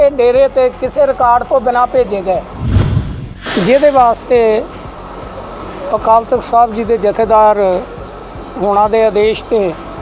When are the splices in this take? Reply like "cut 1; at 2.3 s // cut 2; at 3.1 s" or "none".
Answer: cut 1; at 3.4 s